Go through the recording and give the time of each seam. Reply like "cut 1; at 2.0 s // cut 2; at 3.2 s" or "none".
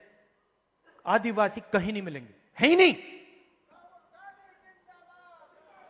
none